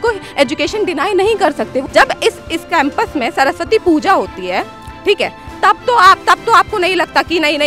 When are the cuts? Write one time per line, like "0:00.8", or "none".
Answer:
0:01.8